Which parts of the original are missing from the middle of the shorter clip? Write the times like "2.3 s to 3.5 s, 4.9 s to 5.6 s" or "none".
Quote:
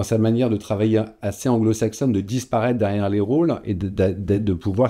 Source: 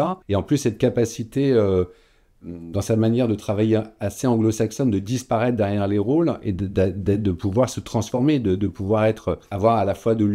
none

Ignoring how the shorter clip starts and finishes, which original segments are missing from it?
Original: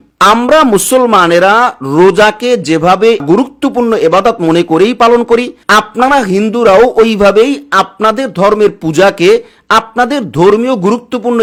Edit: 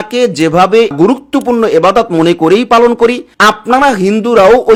none

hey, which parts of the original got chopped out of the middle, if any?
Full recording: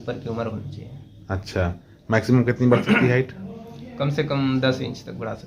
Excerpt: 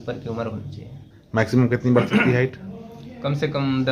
1.1 s to 1.9 s

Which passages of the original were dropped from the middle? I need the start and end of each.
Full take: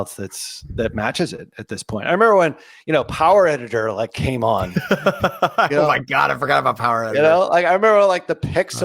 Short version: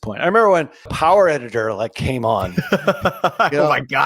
2.8 s to 3.1 s

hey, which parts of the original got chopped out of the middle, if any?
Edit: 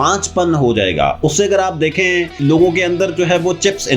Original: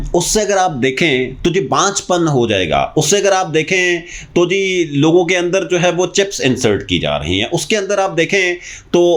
4.1 s to 4.9 s

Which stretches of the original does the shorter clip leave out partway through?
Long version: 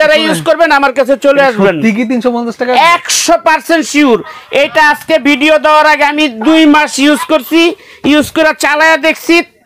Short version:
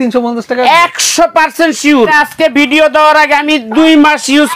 4.2 s to 4.8 s

